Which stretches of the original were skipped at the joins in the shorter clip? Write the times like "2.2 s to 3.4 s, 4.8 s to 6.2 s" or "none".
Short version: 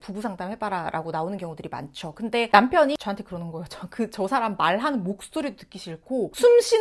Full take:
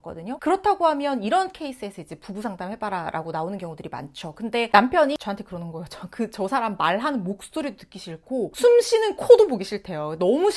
none